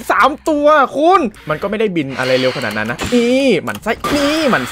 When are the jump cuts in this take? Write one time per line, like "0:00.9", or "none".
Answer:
0:01.4